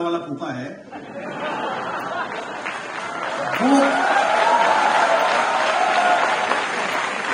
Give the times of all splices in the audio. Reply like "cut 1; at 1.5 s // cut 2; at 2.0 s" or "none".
none